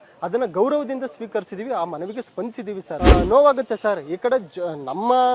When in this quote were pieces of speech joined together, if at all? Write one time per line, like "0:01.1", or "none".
0:02.9